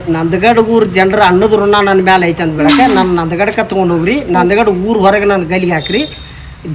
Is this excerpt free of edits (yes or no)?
yes